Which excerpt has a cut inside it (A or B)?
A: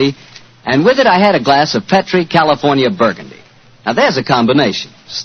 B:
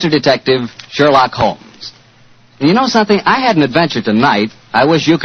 B